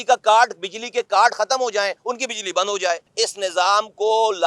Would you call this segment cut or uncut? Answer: cut